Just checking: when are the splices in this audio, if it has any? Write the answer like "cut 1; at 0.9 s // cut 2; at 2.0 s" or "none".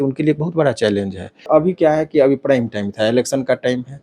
cut 1; at 1.5 s